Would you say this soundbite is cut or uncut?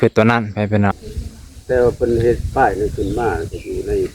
cut